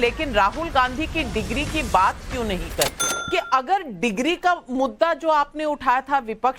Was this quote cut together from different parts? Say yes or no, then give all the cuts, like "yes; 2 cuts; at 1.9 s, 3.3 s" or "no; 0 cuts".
yes; 1 cut; at 3.1 s